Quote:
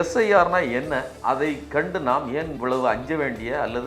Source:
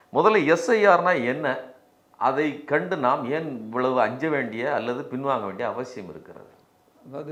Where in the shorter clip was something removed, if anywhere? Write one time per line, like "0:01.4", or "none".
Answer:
0:01.1
0:02.5